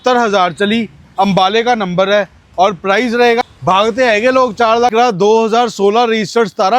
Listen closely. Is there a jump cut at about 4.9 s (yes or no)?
yes